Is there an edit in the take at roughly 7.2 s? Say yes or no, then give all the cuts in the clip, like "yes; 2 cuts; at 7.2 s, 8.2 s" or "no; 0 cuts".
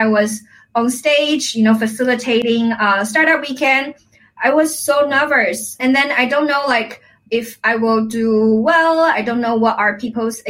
yes; 2 cuts; at 5.8 s, 7.2 s